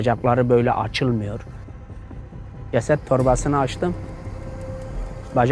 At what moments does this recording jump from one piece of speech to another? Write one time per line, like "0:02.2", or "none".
0:02.0